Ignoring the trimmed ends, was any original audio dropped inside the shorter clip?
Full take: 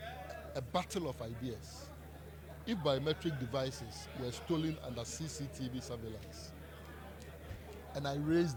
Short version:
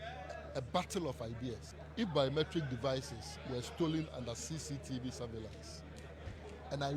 yes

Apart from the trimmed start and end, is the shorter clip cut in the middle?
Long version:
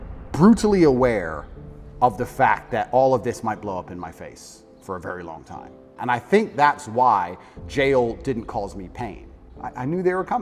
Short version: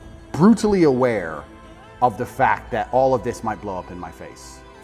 no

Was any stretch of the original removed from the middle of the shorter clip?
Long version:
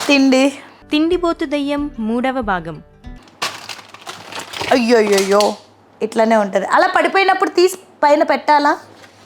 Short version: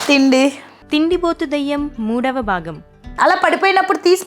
yes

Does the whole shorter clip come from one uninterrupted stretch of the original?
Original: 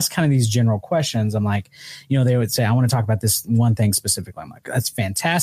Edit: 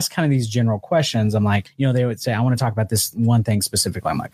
no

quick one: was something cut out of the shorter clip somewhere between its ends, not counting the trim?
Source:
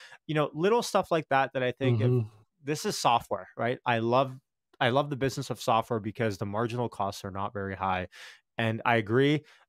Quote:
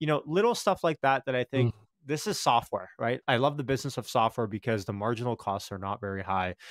yes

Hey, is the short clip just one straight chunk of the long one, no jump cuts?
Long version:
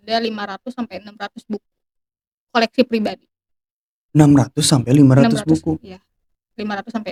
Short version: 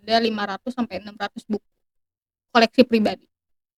yes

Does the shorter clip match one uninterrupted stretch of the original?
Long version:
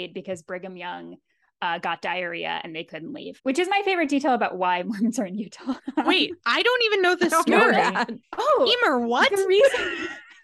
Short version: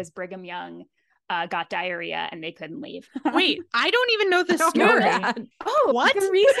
no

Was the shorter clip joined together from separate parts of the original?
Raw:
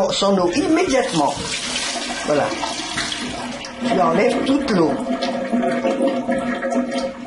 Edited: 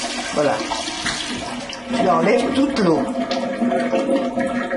no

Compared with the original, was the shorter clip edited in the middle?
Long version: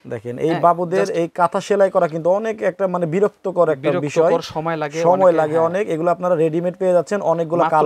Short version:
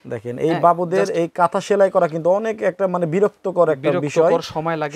no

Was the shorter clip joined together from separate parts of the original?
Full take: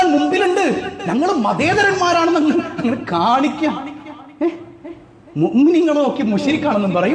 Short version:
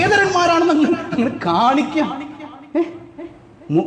no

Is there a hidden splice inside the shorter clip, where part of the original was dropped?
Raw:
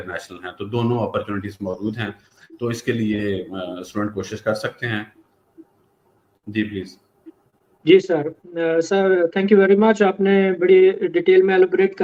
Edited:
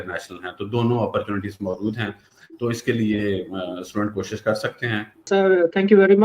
yes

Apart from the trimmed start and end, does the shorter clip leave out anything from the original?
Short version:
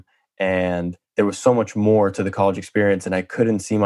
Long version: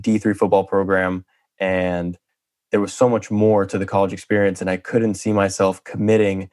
yes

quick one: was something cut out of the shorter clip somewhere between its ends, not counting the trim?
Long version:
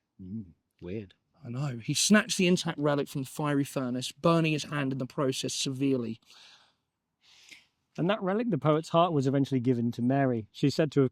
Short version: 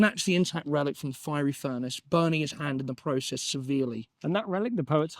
yes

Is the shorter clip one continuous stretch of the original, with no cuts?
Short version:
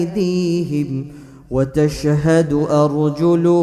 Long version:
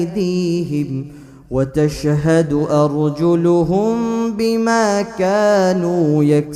yes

